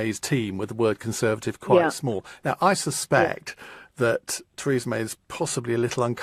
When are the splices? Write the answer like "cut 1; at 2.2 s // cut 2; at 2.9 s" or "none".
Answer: cut 1; at 1.5 s